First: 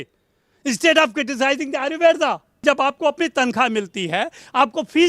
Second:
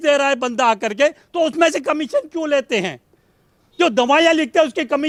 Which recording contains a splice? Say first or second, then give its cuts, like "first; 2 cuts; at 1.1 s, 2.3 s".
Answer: first; 1 cut; at 2.6 s